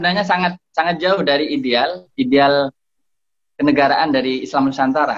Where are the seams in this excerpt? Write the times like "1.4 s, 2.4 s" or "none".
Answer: 2.0 s